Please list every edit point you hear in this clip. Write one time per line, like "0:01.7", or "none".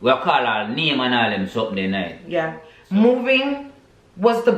0:02.7